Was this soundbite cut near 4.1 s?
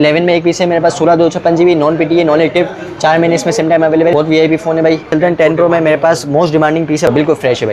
yes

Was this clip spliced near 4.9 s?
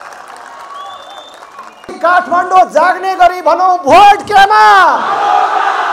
no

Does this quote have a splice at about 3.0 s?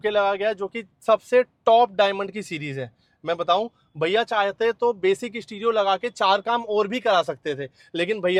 no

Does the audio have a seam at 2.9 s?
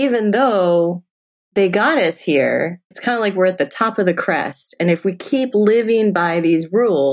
yes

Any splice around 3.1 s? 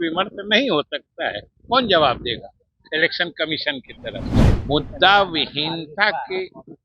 no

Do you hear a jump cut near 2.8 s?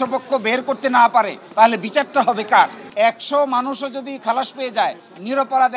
yes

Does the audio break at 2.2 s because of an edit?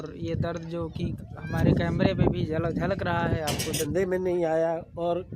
no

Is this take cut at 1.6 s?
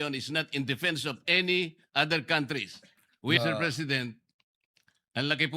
no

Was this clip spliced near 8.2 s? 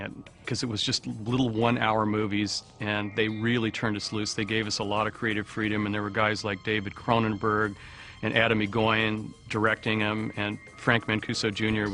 yes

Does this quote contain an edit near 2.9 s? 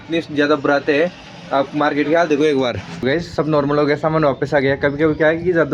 yes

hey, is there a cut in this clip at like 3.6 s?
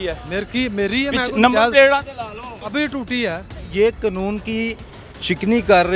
yes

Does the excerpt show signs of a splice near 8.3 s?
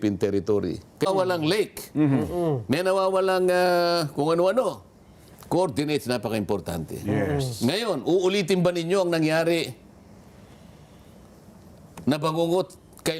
no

